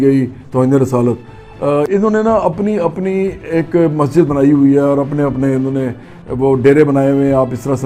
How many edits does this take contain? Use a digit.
0